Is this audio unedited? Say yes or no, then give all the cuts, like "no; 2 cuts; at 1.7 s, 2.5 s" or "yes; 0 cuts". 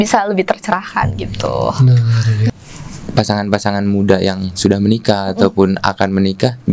no; 1 cut; at 2.5 s